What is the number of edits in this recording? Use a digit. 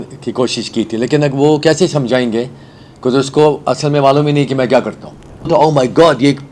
1